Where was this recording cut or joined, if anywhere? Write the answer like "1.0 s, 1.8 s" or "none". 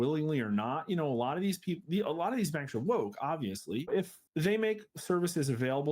3.9 s